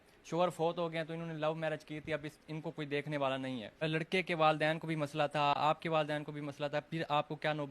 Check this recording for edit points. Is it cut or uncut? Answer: cut